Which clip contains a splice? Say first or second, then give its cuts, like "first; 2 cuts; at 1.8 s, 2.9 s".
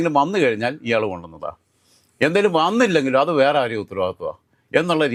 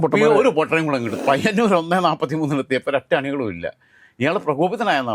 second; 1 cut; at 1.1 s